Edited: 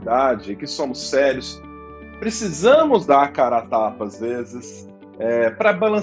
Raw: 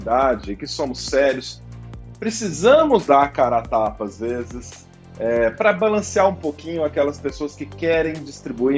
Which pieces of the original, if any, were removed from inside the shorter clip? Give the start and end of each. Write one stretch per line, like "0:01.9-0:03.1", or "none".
none